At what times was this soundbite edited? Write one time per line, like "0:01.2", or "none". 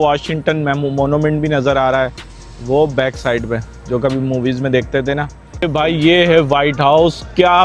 0:05.4

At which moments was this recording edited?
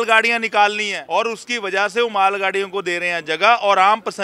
0:00.9

